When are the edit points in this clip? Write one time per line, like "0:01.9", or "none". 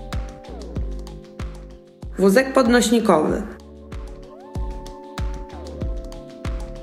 0:01.7
0:03.6

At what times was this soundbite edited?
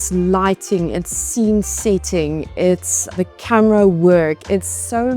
0:03.1

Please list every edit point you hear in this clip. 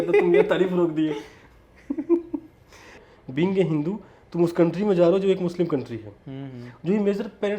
0:03.0

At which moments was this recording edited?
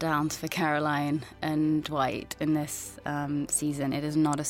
none

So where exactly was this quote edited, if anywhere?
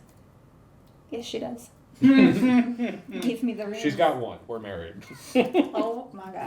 none

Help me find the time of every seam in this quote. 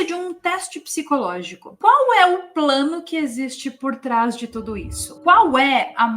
0:01.6

